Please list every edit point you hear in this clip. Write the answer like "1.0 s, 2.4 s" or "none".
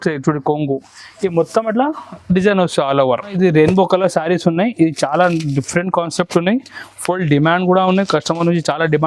3.3 s

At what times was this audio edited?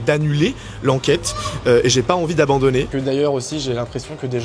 2.9 s

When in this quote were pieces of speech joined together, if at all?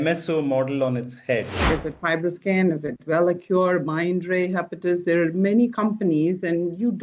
1.7 s

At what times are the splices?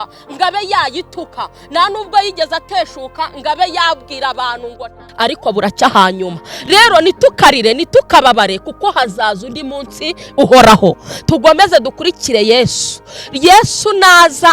5.0 s

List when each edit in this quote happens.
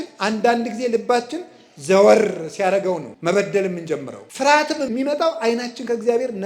3.1 s, 4.2 s, 4.9 s

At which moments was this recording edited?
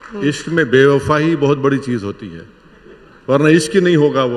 none

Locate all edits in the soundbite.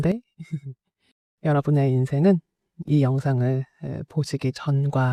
none

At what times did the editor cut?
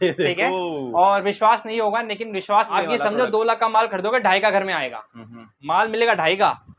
2.7 s

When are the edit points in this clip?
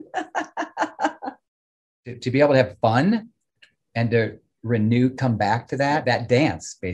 1.8 s, 6.0 s

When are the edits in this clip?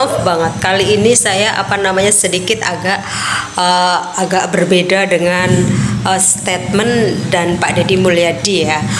none

